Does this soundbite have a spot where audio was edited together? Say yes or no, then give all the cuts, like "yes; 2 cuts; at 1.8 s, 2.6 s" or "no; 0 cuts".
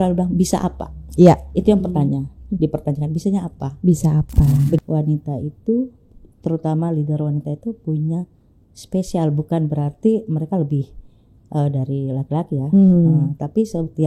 yes; 1 cut; at 4.8 s